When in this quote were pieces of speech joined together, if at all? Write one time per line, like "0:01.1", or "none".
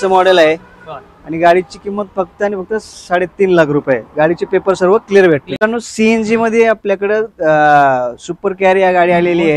0:05.5